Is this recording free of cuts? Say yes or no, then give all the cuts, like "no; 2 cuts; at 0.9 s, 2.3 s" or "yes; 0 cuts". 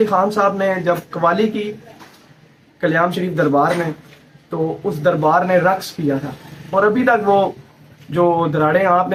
yes; 0 cuts